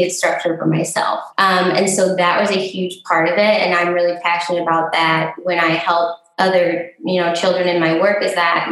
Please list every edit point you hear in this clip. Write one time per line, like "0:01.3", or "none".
0:01.3